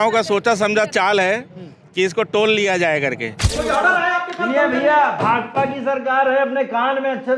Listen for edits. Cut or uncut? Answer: cut